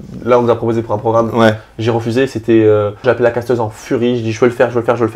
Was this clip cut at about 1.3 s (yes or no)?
no